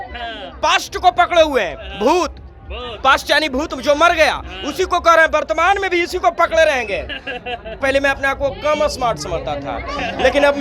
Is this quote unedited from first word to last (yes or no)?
no